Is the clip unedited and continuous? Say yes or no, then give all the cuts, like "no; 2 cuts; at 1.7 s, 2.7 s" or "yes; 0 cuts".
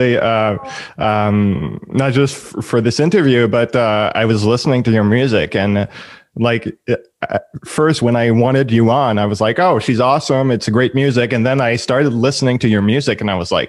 yes; 0 cuts